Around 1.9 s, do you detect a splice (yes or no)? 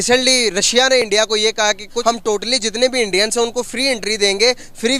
yes